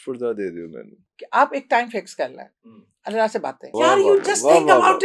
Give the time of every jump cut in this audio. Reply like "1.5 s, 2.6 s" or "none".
1.1 s, 3.7 s